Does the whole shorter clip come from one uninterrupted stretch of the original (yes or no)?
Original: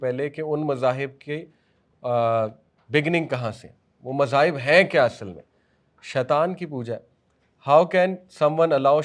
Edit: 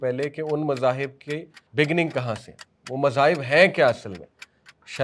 no